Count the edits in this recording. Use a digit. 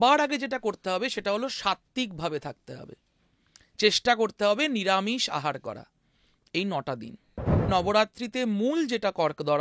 1